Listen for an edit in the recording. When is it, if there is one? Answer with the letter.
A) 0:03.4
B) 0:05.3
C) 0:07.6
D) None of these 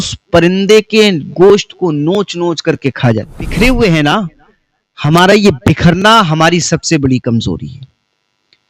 A